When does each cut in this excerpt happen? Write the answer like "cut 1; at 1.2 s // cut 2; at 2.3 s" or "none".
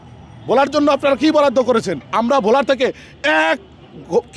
cut 1; at 2.1 s